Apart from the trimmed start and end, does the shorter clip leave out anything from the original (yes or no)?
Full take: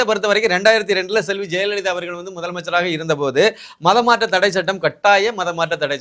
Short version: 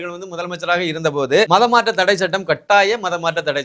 yes